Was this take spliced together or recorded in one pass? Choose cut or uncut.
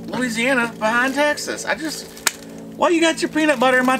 uncut